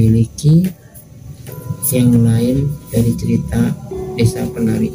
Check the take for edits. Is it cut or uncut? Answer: uncut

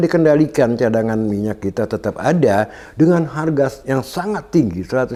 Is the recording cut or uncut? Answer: uncut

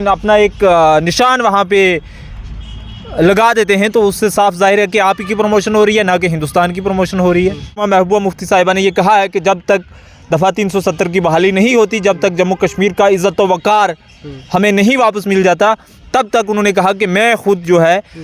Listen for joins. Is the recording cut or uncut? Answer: cut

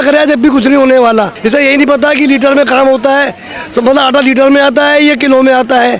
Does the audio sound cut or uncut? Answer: cut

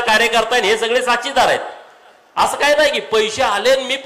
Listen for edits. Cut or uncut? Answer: uncut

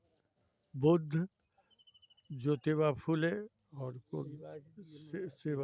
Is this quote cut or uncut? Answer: uncut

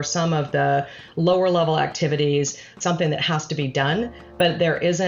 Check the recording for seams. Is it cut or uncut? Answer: cut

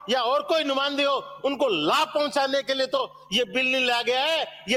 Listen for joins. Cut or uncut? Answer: uncut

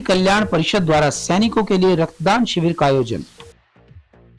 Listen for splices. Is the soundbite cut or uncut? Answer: cut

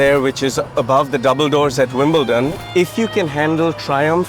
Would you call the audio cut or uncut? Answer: cut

